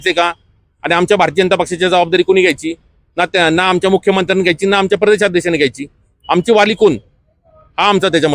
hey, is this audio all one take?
yes; 0 cuts

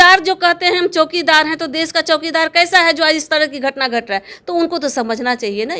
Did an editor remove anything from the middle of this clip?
no; 0 cuts

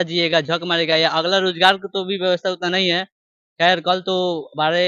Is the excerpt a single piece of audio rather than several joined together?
yes; 0 cuts

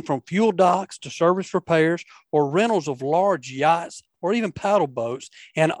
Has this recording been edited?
no; 0 cuts

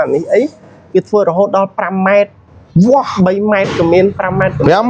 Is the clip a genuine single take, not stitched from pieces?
yes; 0 cuts

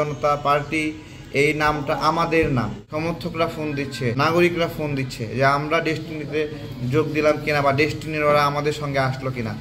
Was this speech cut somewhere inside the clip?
yes; 2 cuts; at 2.8 s, 4.1 s

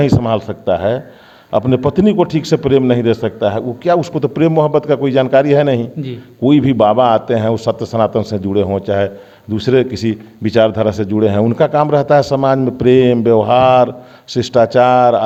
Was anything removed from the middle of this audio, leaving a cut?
no; 0 cuts

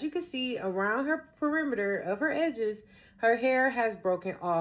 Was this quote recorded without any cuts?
yes; 0 cuts

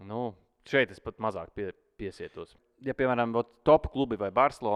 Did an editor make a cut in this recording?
yes; 1 cut; at 2.5 s

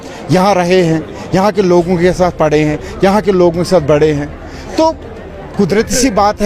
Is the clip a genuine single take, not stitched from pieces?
yes; 0 cuts

